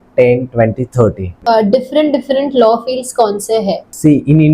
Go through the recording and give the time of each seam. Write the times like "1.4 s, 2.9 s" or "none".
1.3 s